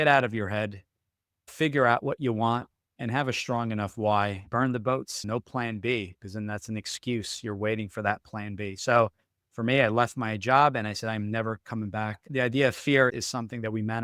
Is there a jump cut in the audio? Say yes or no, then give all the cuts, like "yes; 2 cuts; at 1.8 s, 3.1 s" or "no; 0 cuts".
yes; 2 cuts; at 4.5 s, 12.3 s